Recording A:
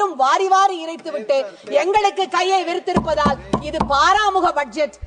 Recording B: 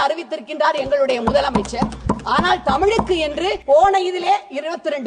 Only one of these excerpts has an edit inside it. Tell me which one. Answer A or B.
B